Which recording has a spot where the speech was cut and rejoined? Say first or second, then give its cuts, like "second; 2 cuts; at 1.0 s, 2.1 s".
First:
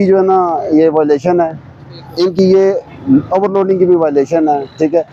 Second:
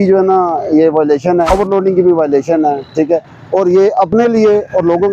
second; 1 cut; at 1.5 s